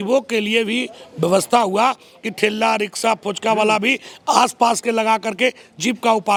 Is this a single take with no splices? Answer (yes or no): yes